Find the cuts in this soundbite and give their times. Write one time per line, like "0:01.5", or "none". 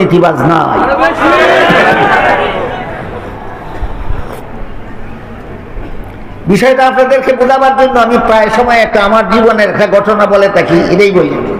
0:03.3